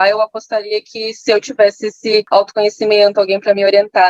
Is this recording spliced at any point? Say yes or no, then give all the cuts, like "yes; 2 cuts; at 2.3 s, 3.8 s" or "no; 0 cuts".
yes; 1 cut; at 2.3 s